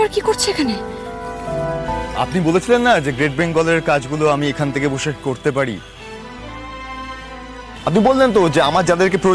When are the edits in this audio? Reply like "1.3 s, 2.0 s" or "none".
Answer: 2.0 s